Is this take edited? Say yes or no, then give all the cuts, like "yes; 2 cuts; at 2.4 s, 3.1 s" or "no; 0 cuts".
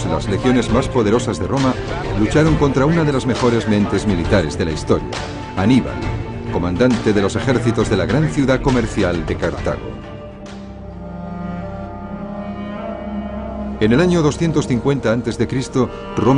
yes; 1 cut; at 6.0 s